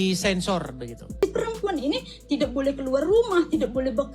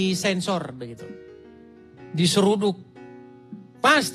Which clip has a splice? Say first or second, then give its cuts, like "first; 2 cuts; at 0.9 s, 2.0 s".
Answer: first; 1 cut; at 1.2 s